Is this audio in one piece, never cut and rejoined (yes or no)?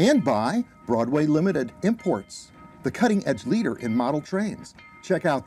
yes